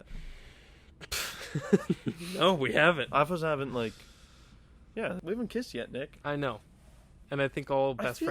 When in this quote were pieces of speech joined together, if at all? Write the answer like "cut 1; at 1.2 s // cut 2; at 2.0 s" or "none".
cut 1; at 5.2 s